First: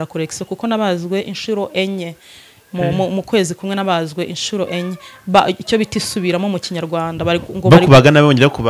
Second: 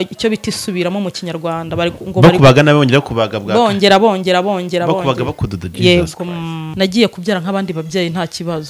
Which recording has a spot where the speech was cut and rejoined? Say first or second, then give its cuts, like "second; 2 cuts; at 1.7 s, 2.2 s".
second; 1 cut; at 6.6 s